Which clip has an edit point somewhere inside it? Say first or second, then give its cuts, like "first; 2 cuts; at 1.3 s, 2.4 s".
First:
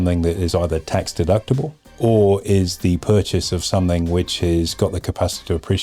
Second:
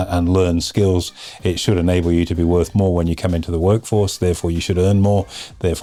first; 1 cut; at 1.8 s